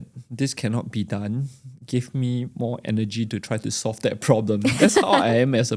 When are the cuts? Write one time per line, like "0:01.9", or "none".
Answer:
none